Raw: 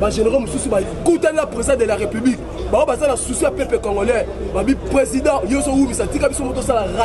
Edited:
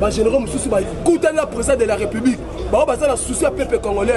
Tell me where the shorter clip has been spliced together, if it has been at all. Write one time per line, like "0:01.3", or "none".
none